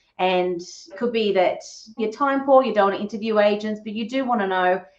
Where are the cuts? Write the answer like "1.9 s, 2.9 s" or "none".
0.9 s, 2.0 s